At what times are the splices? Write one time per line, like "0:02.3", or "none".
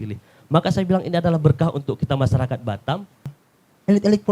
0:03.3

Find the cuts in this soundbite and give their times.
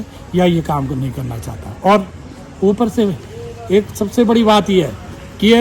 none

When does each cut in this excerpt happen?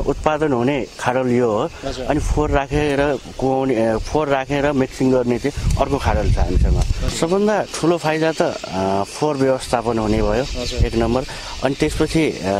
0:07.0

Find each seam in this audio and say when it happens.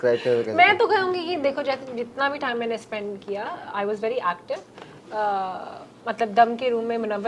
none

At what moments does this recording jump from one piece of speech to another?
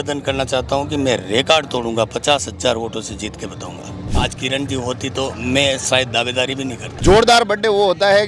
0:04.1
0:06.8

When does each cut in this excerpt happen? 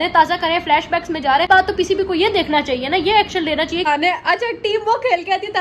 0:01.5
0:03.9

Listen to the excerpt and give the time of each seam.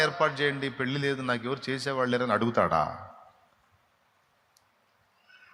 none

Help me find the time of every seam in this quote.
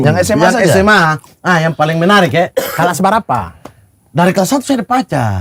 none

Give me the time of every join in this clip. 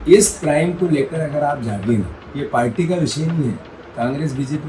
none

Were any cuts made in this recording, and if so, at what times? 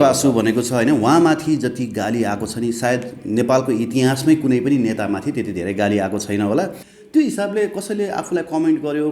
0:06.8

